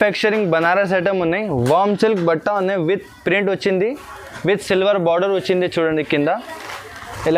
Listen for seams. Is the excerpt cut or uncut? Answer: uncut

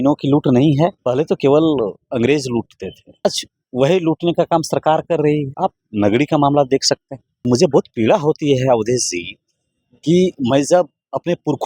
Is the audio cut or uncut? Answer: cut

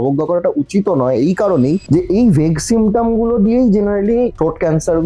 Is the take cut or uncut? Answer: uncut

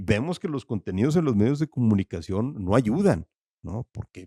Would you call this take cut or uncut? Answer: uncut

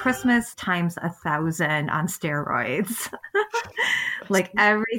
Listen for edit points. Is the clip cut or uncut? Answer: cut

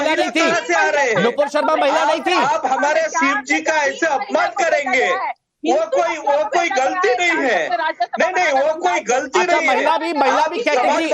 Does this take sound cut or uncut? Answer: cut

